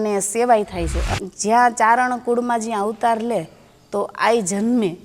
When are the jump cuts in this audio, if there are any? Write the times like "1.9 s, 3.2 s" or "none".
1.0 s